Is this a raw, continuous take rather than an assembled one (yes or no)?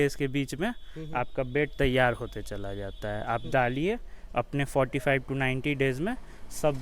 yes